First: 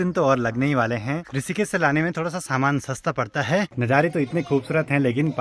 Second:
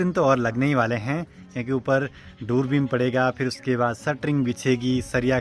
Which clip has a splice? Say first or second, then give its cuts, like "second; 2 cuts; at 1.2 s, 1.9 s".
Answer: first; 2 cuts; at 1.3 s, 3.7 s